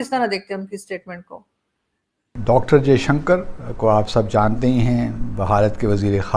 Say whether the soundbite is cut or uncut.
cut